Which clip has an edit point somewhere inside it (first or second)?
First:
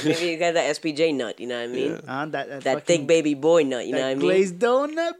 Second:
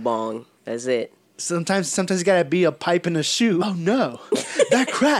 second